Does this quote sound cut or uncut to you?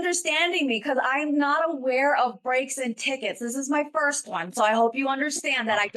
uncut